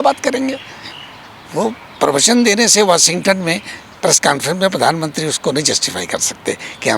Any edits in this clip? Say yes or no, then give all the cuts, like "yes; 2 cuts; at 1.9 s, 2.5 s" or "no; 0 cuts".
no; 0 cuts